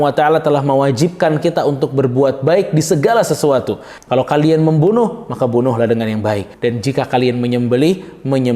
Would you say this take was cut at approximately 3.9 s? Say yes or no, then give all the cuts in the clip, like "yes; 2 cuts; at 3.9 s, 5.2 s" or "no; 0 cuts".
yes; 2 cuts; at 3.9 s, 6.5 s